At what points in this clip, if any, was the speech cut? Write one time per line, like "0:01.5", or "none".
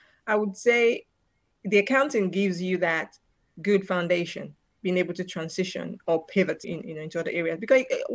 none